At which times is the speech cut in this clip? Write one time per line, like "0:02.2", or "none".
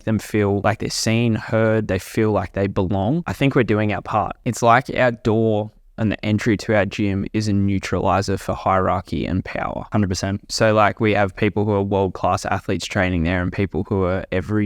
0:04.4
0:09.8